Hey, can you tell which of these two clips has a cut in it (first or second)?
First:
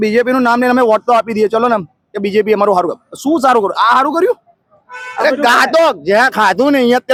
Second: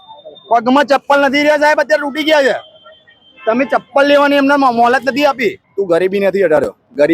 second